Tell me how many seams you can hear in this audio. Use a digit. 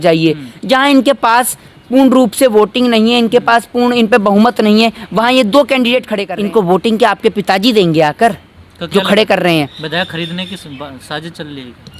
1